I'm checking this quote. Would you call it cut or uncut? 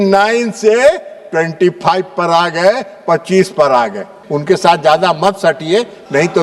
cut